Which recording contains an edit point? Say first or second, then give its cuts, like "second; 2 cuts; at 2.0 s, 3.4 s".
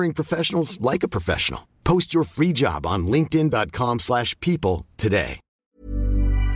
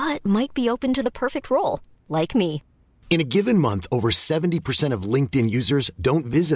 first; 1 cut; at 5.5 s